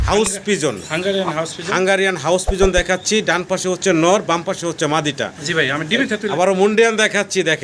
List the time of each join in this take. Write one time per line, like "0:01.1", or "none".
0:06.3